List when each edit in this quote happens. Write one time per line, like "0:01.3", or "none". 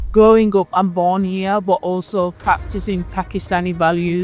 0:02.4